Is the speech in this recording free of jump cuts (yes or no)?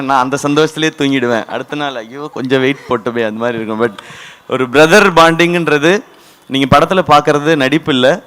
yes